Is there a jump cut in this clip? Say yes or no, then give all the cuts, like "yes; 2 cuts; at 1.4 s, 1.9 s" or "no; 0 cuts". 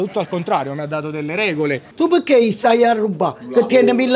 yes; 1 cut; at 1.8 s